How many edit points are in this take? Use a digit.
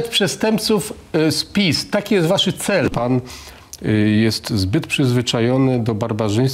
1